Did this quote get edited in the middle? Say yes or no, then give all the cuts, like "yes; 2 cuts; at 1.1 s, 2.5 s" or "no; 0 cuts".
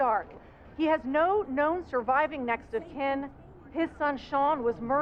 no; 0 cuts